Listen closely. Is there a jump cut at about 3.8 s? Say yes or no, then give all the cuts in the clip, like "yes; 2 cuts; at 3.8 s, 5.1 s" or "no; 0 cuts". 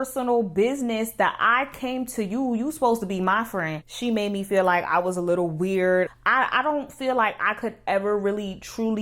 yes; 2 cuts; at 3.8 s, 6.2 s